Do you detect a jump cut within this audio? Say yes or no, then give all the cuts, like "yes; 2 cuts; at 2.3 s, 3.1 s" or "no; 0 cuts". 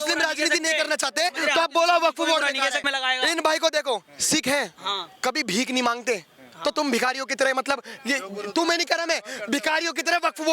yes; 1 cut; at 2.8 s